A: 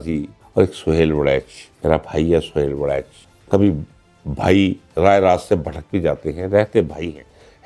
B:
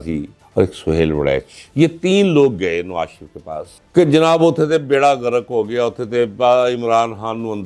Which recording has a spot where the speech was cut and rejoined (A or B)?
B